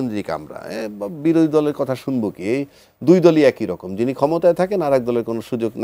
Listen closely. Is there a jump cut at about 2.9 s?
no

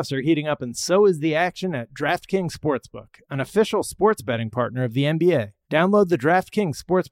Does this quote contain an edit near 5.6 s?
yes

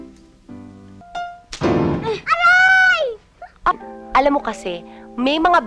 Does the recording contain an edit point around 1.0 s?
yes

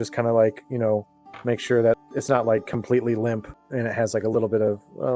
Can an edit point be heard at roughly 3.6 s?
yes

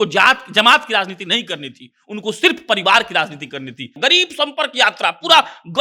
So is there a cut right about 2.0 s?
no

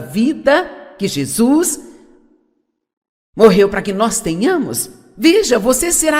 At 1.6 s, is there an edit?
no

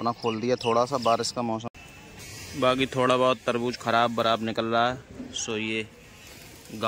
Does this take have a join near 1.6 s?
yes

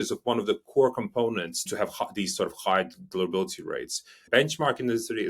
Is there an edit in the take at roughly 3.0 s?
no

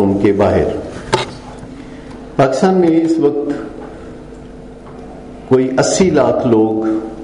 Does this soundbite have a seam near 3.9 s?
no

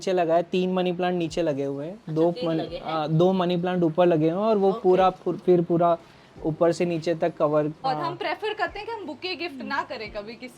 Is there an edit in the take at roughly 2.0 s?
no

